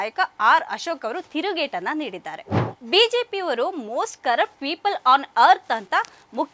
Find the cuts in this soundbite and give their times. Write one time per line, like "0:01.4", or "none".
0:02.5